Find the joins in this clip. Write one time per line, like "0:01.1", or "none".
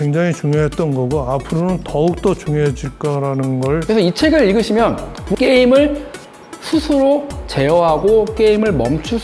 0:03.8
0:05.3

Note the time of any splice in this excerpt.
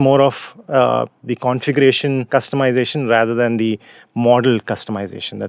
0:02.2

